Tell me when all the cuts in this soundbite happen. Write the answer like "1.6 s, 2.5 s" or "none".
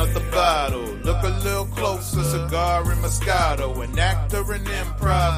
none